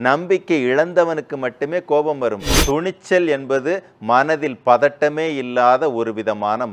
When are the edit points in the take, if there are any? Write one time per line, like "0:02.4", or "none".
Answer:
0:02.5